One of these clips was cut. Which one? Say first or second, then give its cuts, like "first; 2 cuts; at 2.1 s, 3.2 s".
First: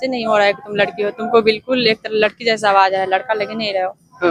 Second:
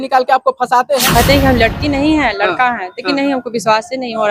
second; 1 cut; at 1.1 s